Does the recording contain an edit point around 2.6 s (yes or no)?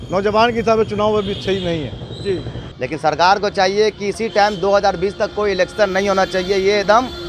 yes